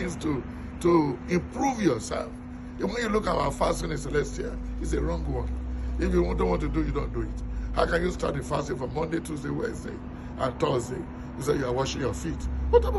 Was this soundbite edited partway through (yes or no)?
no